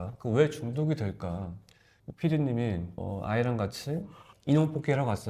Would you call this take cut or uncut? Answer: uncut